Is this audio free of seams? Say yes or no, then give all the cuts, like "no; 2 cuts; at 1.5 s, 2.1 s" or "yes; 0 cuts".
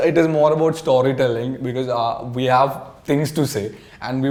yes; 0 cuts